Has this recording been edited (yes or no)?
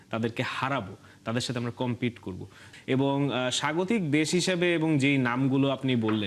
yes